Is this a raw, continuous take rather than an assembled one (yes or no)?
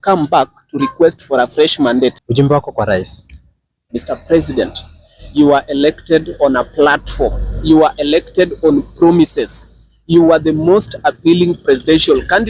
no